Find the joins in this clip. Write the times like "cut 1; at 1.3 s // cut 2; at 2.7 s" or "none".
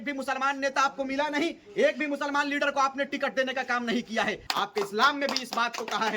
cut 1; at 4.4 s